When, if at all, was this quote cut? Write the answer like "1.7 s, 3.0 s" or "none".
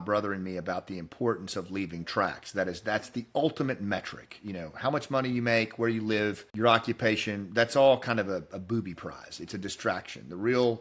6.4 s